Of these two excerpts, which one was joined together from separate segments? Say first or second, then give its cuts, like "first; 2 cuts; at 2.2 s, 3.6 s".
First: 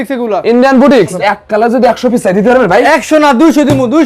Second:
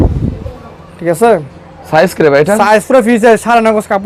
first; 1 cut; at 1.1 s